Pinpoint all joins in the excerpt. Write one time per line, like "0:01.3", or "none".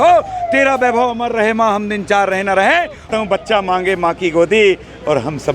0:03.1